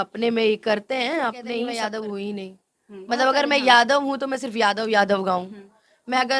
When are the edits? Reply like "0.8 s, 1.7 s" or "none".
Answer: 1.6 s